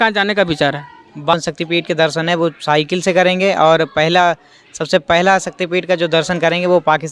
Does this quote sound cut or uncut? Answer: cut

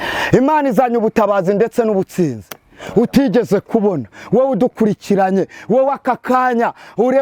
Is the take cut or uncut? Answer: uncut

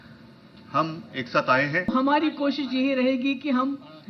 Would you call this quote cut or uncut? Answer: cut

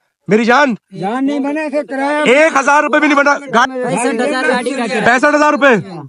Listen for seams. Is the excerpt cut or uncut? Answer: cut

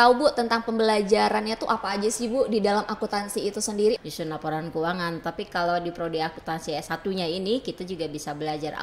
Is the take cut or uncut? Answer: cut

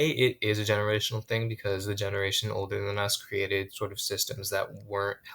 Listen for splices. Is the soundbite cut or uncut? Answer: uncut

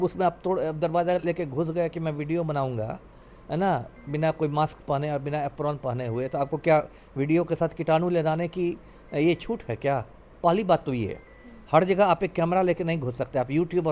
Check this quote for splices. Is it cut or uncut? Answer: uncut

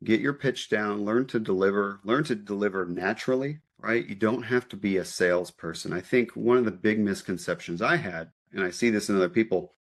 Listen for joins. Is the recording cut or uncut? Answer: uncut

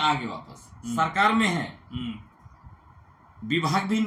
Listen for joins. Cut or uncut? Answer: uncut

